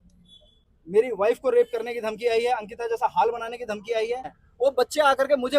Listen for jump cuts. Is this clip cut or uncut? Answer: cut